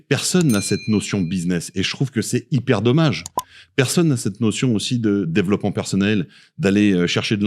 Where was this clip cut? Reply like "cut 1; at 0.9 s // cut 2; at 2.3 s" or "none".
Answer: none